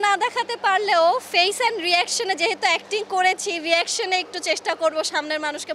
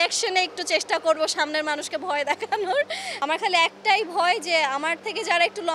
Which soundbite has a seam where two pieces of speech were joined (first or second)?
second